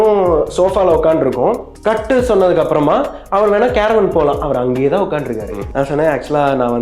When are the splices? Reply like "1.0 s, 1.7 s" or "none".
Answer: 1.7 s, 5.6 s